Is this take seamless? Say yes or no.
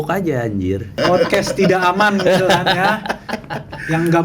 no